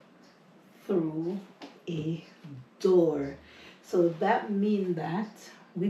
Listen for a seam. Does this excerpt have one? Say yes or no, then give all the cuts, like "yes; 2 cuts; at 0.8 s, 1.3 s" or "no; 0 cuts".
no; 0 cuts